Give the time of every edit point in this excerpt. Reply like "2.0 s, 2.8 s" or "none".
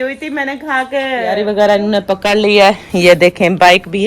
1.3 s

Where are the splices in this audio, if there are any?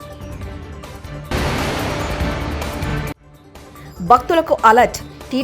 1.3 s, 3.3 s

